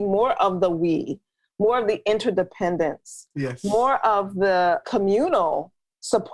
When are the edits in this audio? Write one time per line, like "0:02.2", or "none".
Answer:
0:04.8